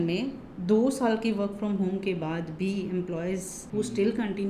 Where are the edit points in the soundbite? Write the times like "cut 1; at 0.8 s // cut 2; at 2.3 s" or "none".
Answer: cut 1; at 3.6 s